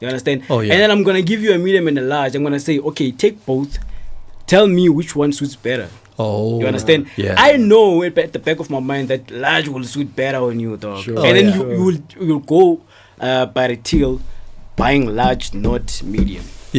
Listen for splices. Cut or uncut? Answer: uncut